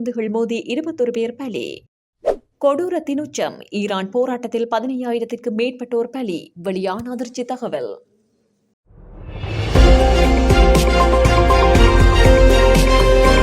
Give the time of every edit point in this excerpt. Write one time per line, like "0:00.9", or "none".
0:08.6